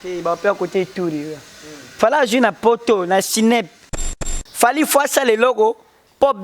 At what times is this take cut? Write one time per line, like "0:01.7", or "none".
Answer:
0:04.2

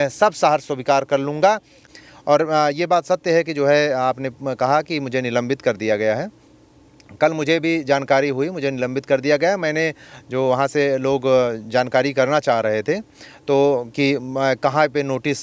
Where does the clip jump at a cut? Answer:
0:01.8

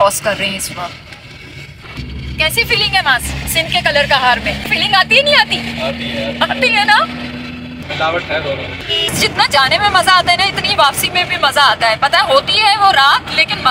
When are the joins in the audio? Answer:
0:01.9
0:09.1

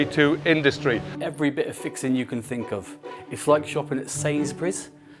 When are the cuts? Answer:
0:01.1

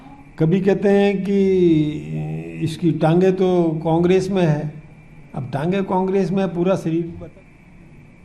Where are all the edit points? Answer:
0:07.1

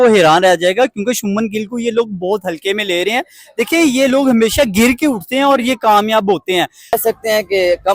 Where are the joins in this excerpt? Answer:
0:07.0

